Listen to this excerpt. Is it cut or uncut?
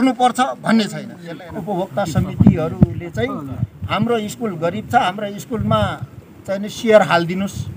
cut